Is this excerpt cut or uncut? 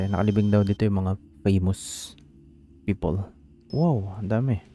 cut